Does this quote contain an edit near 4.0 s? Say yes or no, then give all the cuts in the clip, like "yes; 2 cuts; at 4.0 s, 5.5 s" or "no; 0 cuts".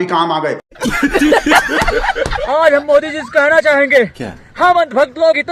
no; 1 cut; at 2.4 s